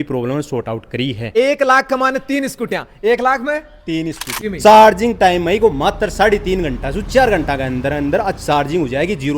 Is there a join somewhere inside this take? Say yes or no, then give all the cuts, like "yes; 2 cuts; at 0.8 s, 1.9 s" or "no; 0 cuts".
yes; 2 cuts; at 1.3 s, 4.3 s